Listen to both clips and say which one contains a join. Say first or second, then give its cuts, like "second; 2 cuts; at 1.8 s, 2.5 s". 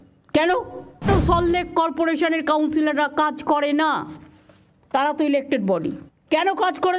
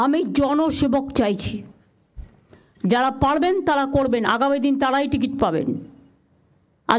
first; 2 cuts; at 1.1 s, 6.1 s